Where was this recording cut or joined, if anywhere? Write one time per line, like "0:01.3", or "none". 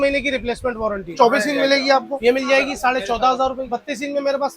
0:01.1
0:03.6